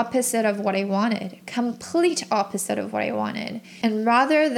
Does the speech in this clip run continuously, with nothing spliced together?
no; 1 cut; at 3.7 s

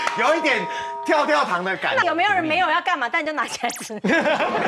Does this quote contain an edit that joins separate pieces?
yes; 1 cut; at 2.0 s

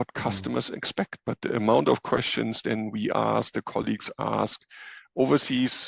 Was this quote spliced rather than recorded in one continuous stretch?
no; 0 cuts

